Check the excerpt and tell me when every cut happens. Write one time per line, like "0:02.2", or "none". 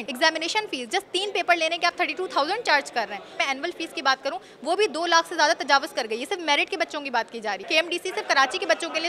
0:03.3
0:07.7